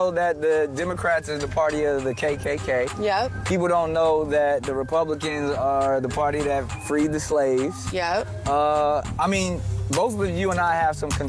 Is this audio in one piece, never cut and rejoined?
no; 1 cut; at 8.3 s

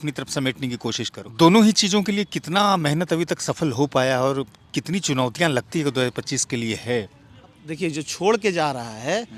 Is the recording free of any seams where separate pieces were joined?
no; 2 cuts; at 1.2 s, 7.6 s

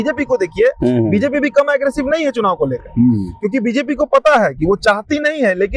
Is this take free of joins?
yes; 0 cuts

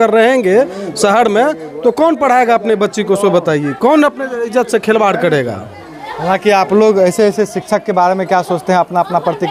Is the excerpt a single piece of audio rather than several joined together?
yes; 0 cuts

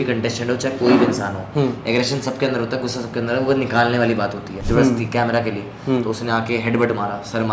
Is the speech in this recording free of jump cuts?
no; 1 cut; at 4.5 s

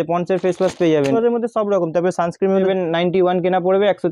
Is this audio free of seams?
no; 2 cuts; at 1.1 s, 2.6 s

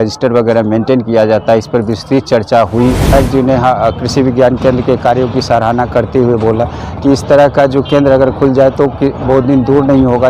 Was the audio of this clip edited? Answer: yes; 1 cut; at 3.0 s

